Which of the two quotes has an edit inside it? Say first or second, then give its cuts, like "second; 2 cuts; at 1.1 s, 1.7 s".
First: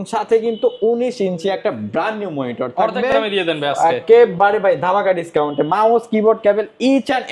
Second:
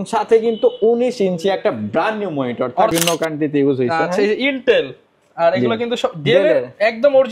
second; 1 cut; at 2.9 s